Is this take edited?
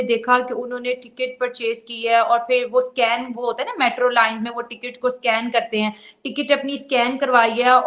no; 0 cuts

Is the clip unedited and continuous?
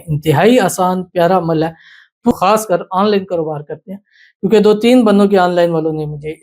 no; 1 cut; at 2.3 s

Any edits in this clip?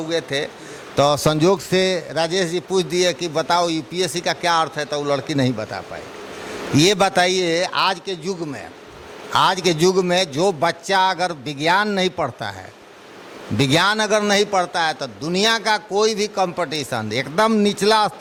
no; 0 cuts

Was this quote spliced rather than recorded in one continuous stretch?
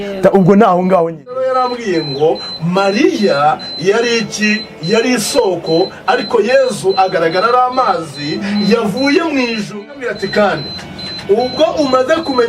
yes; 2 cuts; at 1.4 s, 9.7 s

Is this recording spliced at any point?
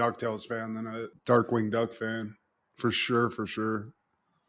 no; 0 cuts

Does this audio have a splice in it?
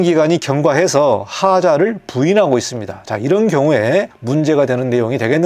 yes; 1 cut; at 4.2 s

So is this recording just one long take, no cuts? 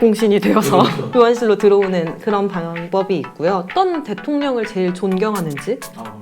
no; 2 cuts; at 1.0 s, 3.7 s

